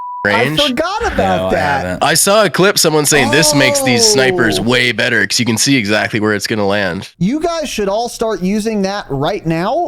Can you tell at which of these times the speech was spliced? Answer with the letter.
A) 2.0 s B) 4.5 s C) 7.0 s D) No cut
C